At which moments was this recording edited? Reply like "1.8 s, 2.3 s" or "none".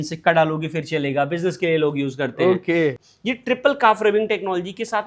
3.0 s